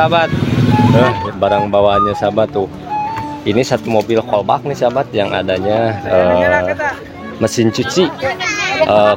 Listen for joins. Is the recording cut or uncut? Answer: cut